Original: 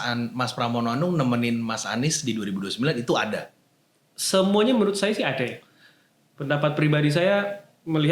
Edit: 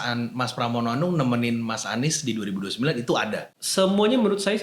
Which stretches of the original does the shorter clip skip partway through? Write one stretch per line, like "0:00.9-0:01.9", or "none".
0:03.5-0:04.1